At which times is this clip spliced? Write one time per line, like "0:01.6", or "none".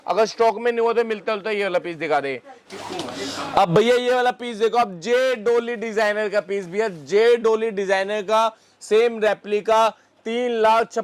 0:02.6